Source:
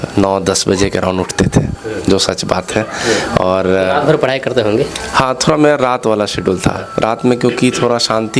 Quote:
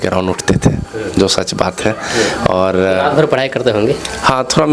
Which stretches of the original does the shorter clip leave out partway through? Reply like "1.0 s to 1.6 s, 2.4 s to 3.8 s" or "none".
none